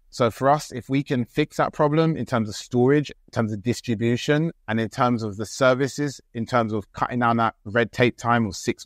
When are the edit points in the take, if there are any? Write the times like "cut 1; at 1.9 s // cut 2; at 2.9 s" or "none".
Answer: cut 1; at 3.1 s // cut 2; at 4.6 s